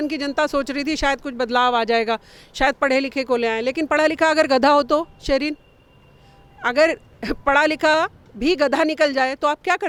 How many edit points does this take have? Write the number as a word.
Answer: zero